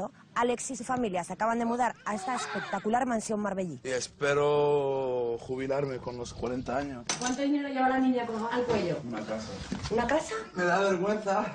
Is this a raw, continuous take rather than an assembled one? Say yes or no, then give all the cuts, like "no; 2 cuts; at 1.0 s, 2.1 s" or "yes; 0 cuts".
no; 1 cut; at 9.8 s